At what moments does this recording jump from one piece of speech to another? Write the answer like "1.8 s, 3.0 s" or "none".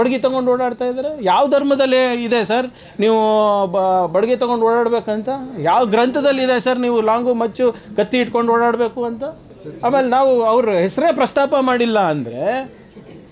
none